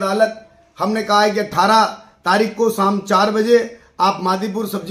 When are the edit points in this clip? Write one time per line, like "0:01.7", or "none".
none

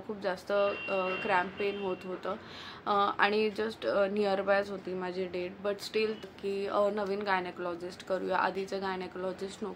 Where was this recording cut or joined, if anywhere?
0:06.2

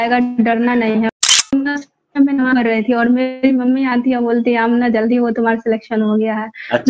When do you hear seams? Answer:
0:01.1

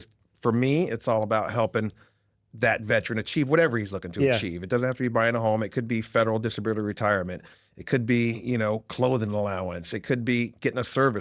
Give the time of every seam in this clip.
none

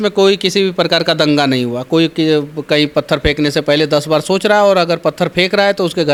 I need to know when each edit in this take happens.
none

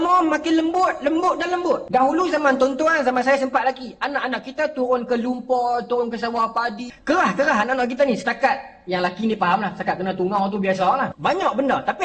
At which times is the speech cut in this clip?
0:01.8
0:06.9
0:11.1

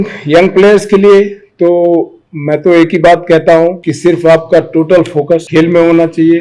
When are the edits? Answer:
0:03.9
0:05.5

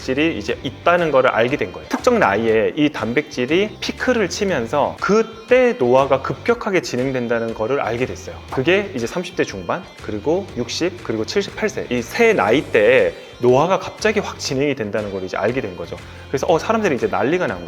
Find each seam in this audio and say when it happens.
0:01.8

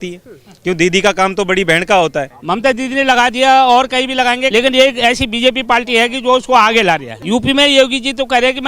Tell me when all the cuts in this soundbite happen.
0:02.3
0:04.5
0:07.1

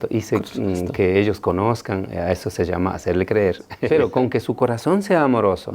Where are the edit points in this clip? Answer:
0:03.7

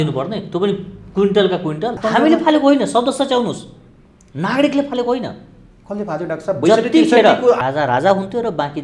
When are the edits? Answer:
0:02.0
0:07.6

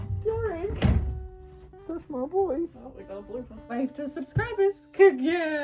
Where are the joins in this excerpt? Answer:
0:03.6

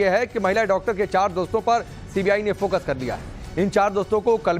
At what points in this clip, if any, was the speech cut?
none

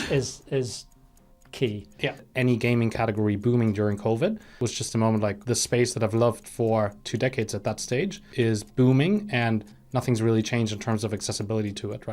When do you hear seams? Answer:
0:02.3
0:04.5
0:05.4
0:08.2

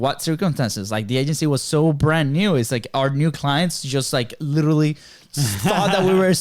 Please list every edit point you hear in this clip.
none

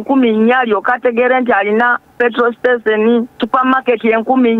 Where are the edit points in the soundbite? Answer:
0:03.4

